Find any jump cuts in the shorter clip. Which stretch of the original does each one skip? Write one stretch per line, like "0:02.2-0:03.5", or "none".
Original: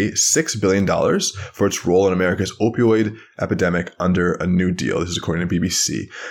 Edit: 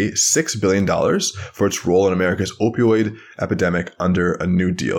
none